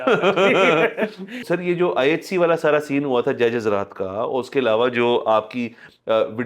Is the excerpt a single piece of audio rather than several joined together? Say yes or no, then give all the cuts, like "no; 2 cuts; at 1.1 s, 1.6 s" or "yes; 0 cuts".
no; 1 cut; at 1.4 s